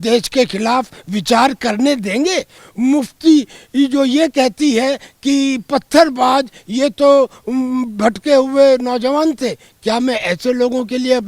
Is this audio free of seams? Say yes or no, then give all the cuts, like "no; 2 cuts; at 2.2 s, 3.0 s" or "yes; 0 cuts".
no; 1 cut; at 2.6 s